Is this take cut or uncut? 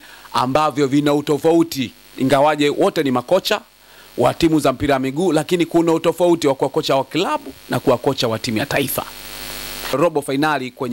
cut